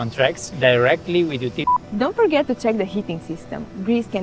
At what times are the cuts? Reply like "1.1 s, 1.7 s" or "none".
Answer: 1.6 s